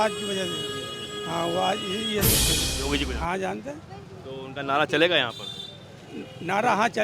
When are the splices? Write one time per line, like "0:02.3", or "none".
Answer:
0:02.7